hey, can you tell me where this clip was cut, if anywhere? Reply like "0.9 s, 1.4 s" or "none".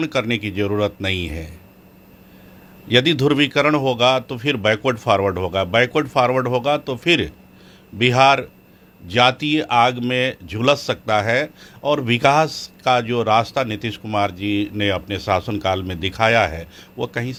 none